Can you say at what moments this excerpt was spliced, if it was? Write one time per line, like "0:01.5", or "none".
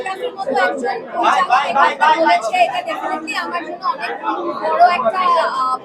none